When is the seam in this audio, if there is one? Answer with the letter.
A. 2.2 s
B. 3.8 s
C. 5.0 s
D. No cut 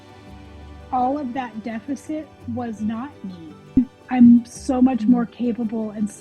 B